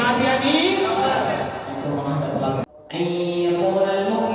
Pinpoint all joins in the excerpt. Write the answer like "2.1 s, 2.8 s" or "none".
2.8 s